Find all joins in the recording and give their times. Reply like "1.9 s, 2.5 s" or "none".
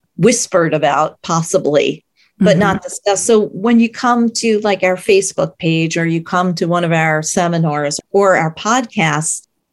none